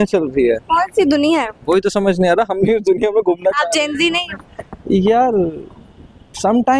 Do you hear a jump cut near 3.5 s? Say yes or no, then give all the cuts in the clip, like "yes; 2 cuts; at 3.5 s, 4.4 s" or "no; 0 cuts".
no; 0 cuts